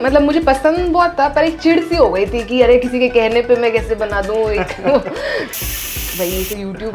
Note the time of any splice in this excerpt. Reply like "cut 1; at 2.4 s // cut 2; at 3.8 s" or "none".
cut 1; at 5.7 s

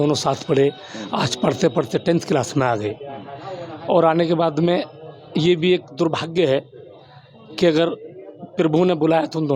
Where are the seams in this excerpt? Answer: none

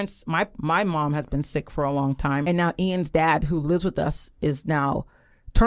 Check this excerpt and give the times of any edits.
cut 1; at 2.5 s

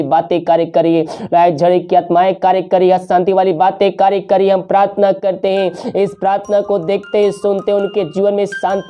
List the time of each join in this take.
none

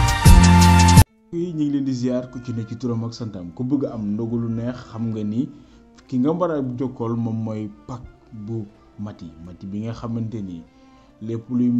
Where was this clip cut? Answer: cut 1; at 1.0 s

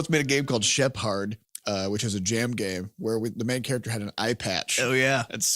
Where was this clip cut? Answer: cut 1; at 1.5 s

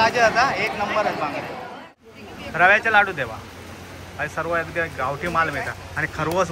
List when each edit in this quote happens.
cut 1; at 1.8 s

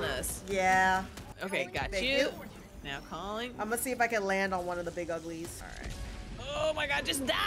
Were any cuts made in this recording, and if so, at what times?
cut 1; at 1.4 s // cut 2; at 5.6 s

